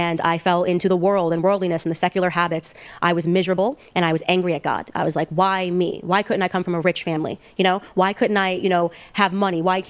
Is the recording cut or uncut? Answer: uncut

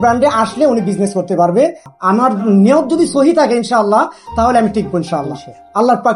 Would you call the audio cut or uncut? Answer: cut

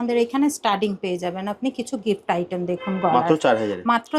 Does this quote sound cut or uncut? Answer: uncut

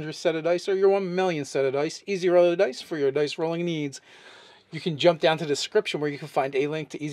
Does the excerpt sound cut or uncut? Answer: cut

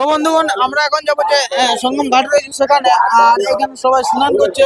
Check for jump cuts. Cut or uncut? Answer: uncut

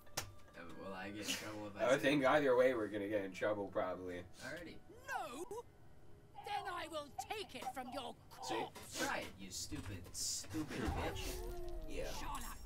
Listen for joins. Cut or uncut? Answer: uncut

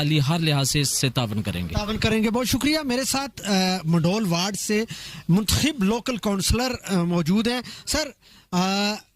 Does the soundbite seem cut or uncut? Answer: uncut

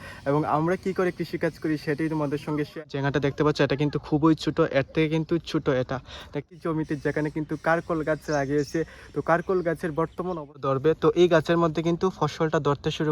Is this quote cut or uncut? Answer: cut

